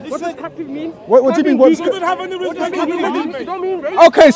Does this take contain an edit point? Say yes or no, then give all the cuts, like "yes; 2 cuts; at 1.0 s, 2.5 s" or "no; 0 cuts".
no; 0 cuts